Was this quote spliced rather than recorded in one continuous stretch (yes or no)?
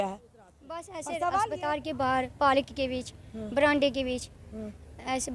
yes